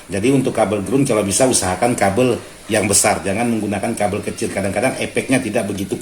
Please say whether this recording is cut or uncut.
uncut